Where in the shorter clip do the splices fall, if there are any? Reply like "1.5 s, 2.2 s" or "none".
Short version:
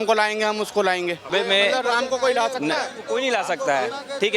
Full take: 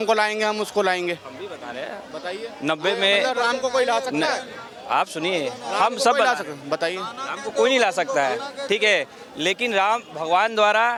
1.3 s, 3.0 s